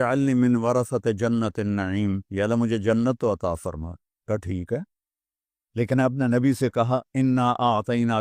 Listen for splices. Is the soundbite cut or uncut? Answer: cut